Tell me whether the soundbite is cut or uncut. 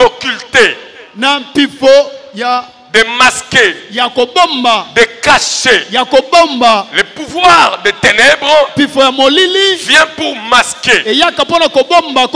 uncut